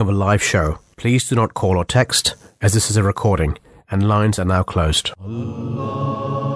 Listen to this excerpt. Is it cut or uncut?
cut